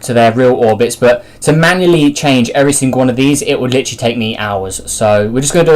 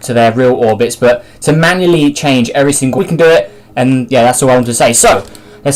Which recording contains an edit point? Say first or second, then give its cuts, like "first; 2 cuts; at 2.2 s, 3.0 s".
first; 1 cut; at 2.9 s